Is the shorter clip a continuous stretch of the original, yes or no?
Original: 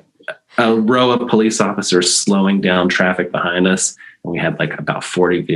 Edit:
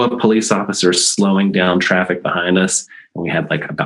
yes